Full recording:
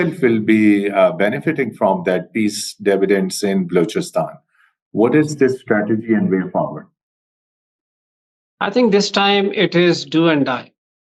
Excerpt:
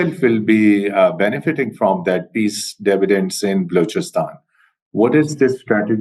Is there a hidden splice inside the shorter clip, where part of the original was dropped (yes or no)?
no